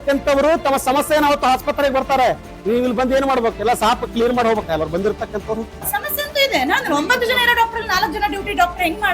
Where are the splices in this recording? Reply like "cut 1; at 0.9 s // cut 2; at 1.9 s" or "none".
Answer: cut 1; at 5.8 s